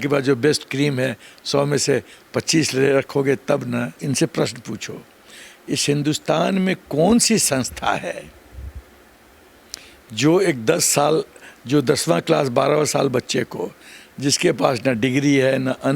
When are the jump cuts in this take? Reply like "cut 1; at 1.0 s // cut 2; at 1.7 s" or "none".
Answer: cut 1; at 3.9 s